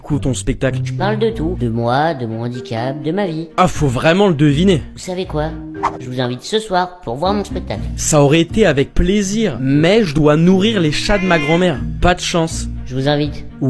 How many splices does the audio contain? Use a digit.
1